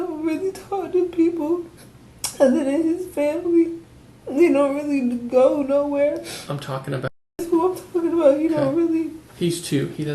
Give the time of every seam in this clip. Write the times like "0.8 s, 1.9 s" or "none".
7.2 s